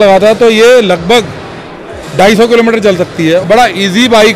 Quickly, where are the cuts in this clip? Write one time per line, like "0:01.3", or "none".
0:03.4